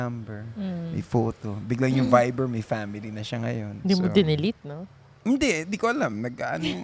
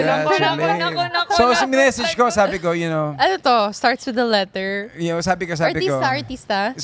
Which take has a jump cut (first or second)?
first